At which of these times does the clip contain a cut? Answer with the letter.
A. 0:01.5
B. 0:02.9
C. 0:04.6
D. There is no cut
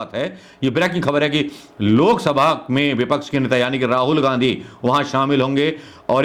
D